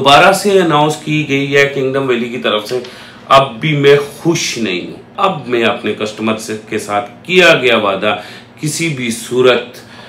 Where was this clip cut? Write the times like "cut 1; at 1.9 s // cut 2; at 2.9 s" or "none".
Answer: cut 1; at 5.1 s